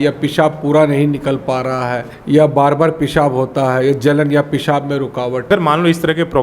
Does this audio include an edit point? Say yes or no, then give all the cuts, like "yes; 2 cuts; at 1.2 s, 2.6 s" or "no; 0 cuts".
yes; 2 cuts; at 2.1 s, 5.4 s